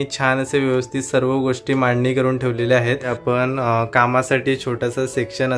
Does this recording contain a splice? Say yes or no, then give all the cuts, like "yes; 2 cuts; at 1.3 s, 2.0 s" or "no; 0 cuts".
yes; 1 cut; at 3.0 s